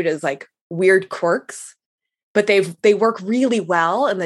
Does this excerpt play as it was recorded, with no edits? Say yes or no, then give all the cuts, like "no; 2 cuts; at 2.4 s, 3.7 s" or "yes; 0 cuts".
yes; 0 cuts